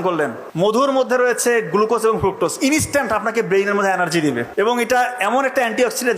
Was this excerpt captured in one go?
no; 2 cuts; at 0.8 s, 4.5 s

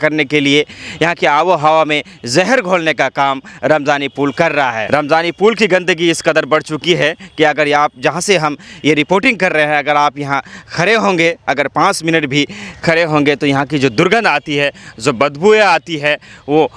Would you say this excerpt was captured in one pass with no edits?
yes; 0 cuts

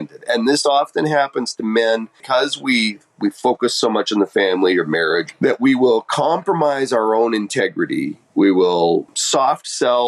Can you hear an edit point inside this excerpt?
yes; 4 cuts; at 2.2 s, 5.3 s, 8.2 s, 9.1 s

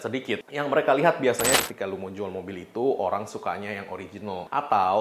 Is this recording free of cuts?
no; 1 cut; at 1.6 s

